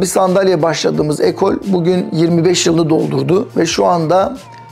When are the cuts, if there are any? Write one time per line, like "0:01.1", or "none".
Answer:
none

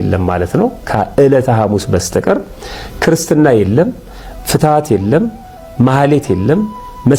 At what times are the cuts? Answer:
none

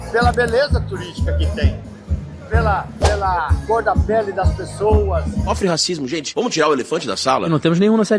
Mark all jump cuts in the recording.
0:05.5
0:07.4

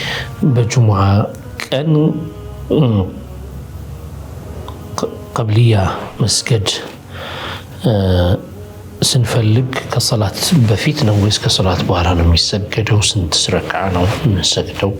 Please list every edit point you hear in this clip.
none

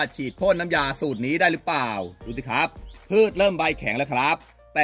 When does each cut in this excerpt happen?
none

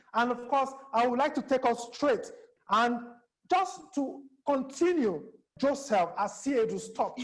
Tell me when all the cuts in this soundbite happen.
0:02.5
0:05.5

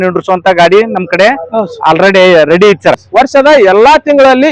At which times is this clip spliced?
0:03.0

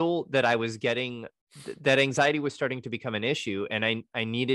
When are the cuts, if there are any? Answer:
0:01.3

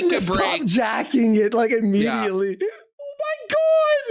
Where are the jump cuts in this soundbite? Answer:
0:03.1

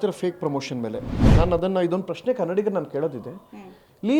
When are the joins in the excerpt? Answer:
0:01.1

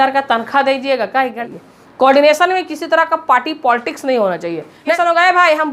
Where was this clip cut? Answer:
0:01.4
0:04.9

